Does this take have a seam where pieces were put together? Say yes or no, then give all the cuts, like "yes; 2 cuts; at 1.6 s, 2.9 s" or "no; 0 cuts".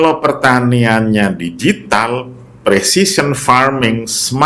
no; 0 cuts